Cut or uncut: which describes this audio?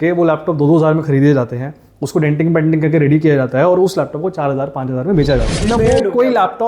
cut